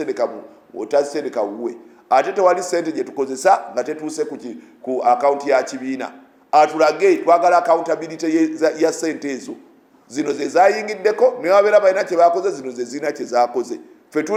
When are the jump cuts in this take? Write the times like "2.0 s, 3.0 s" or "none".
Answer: none